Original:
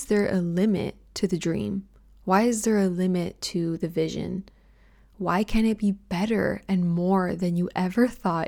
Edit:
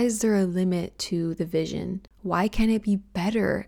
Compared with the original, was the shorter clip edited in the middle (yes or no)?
yes